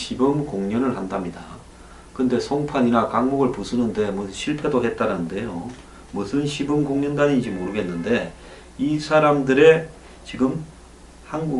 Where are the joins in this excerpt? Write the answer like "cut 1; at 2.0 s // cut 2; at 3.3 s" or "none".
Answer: cut 1; at 5.4 s